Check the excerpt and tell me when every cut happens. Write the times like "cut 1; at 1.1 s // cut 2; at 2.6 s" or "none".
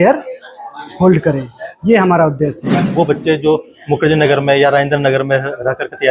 cut 1; at 2.8 s